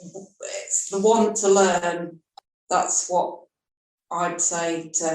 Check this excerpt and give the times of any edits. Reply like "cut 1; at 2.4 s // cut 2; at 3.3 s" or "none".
cut 1; at 2.2 s